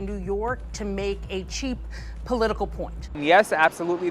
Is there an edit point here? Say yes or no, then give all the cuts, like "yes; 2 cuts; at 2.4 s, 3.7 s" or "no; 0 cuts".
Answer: yes; 1 cut; at 3.1 s